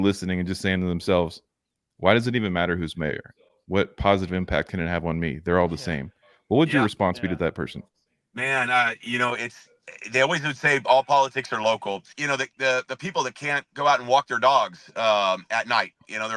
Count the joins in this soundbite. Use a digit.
1